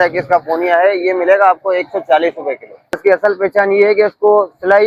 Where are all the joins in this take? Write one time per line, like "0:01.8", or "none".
0:02.9

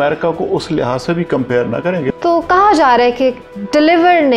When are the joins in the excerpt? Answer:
0:02.1

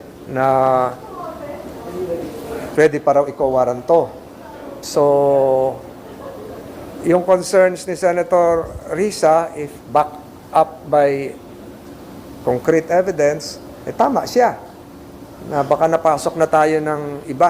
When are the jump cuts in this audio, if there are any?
none

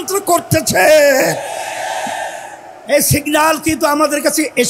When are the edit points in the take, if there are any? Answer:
none

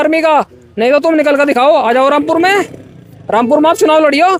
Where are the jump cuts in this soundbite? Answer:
none

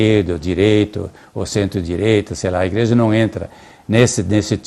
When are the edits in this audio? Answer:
none

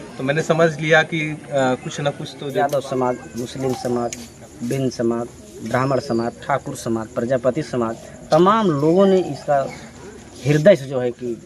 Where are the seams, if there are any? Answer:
0:02.4

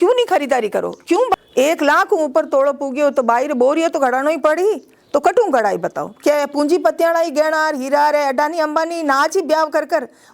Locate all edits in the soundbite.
0:01.4

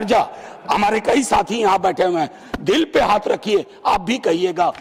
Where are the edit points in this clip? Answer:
none

